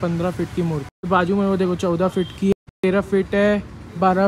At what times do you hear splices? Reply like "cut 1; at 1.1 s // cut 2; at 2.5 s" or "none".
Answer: cut 1; at 1.1 s // cut 2; at 2.5 s